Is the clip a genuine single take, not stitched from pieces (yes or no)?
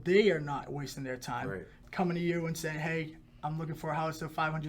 no